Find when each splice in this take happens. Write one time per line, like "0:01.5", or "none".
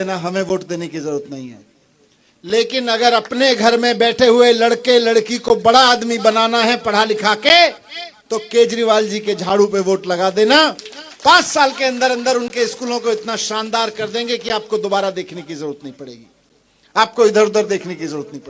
none